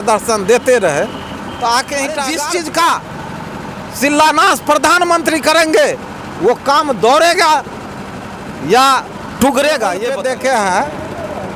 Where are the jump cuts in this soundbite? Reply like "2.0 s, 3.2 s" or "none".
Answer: 2.3 s, 10.1 s

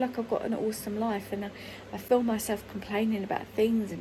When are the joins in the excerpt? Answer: none

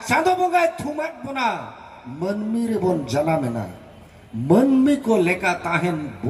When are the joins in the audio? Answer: none

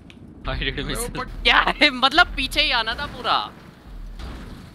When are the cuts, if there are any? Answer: 1.3 s

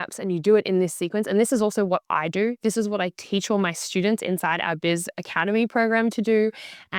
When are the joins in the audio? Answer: none

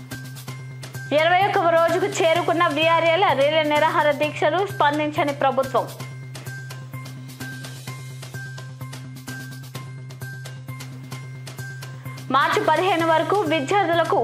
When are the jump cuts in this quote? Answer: 0.9 s, 5.9 s

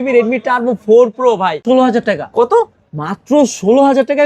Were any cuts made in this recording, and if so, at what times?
1.6 s

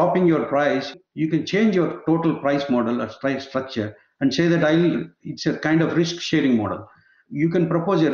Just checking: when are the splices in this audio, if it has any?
0.9 s, 7.1 s

